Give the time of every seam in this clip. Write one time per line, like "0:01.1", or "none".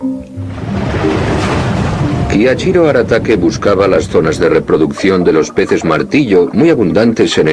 0:05.1